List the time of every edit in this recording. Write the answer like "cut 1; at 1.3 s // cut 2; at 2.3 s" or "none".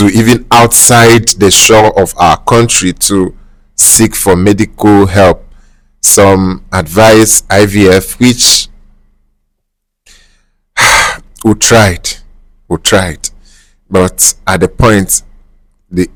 none